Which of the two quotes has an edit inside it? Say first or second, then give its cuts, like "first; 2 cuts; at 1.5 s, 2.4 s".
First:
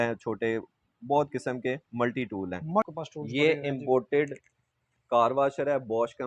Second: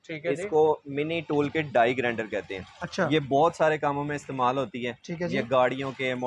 first; 1 cut; at 2.9 s